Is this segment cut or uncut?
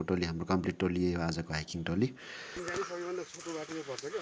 cut